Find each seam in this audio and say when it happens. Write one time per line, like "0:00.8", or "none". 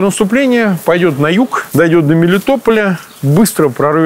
0:01.6